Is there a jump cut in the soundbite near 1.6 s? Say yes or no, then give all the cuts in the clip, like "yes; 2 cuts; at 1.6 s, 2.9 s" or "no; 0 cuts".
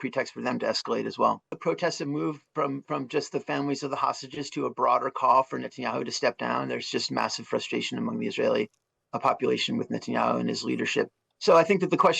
yes; 1 cut; at 1.6 s